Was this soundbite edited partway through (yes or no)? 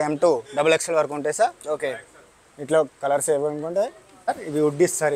no